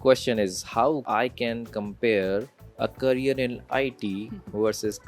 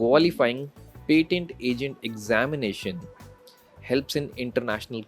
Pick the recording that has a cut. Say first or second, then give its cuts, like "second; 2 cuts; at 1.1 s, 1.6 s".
first; 2 cuts; at 1.0 s, 2.6 s